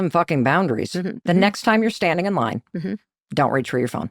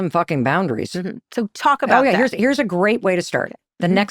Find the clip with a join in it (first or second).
first